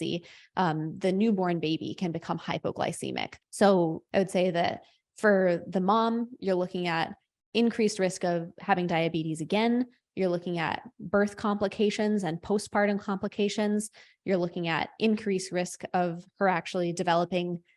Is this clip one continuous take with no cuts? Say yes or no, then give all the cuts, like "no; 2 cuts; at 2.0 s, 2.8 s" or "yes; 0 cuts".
no; 2 cuts; at 3.4 s, 4.0 s